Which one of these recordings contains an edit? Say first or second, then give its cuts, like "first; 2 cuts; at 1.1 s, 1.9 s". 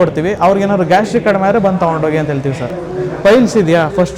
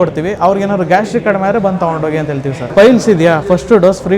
second; 1 cut; at 2.7 s